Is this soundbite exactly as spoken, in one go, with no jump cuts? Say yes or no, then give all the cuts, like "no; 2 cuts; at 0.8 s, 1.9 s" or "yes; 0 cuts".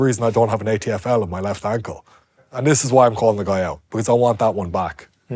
no; 1 cut; at 2.4 s